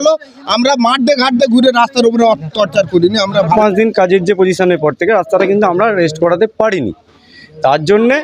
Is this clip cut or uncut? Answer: cut